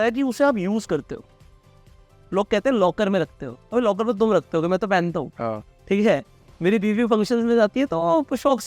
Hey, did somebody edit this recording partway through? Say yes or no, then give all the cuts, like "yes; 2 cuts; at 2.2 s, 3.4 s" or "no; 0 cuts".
no; 0 cuts